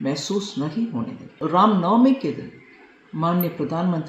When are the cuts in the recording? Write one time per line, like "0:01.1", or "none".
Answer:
0:01.4